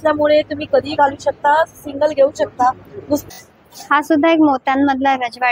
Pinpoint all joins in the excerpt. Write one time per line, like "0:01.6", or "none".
0:03.2

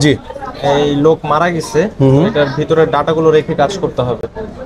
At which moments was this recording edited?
none

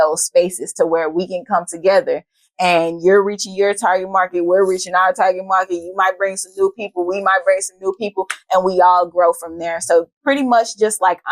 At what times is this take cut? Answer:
none

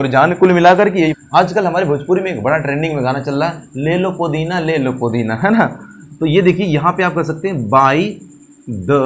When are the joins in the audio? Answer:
0:01.1

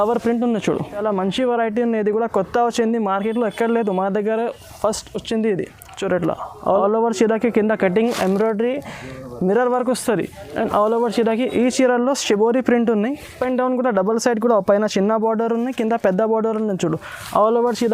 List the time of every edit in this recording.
0:01.0
0:06.5
0:13.4

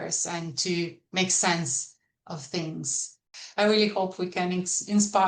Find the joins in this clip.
0:03.4

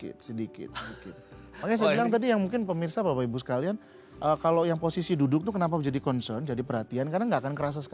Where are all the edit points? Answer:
none

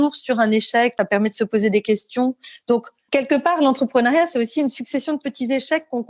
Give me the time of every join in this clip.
0:00.9
0:03.0

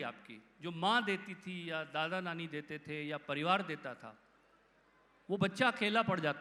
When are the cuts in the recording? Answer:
none

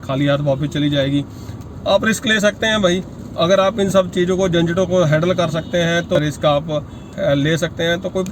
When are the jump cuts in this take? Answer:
0:06.2

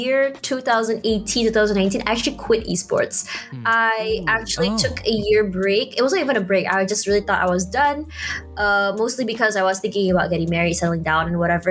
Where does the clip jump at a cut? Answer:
none

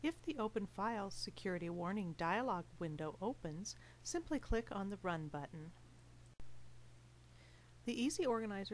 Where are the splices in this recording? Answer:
0:06.4

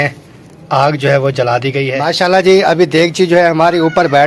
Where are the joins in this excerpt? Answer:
0:01.9

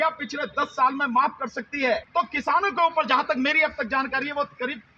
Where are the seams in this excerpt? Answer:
0:02.1

